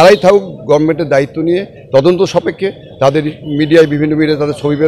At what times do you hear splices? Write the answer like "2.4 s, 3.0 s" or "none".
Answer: none